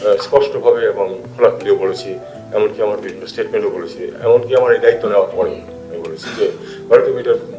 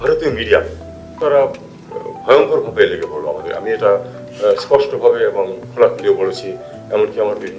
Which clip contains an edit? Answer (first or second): second